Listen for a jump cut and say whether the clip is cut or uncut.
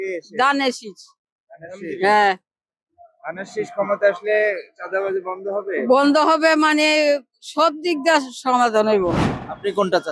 uncut